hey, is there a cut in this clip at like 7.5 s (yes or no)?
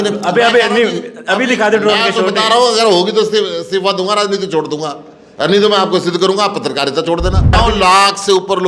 yes